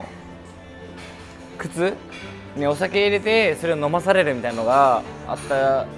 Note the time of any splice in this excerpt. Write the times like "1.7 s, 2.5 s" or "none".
none